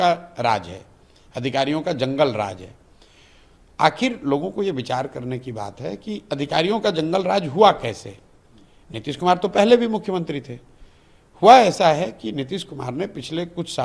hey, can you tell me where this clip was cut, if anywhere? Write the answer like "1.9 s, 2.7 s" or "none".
none